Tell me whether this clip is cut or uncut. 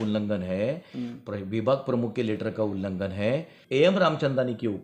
cut